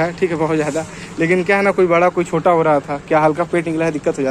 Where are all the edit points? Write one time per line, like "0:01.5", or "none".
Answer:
none